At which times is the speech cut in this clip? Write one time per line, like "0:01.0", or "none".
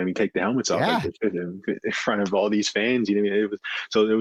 none